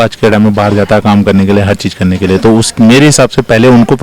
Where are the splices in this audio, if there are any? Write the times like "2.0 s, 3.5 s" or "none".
none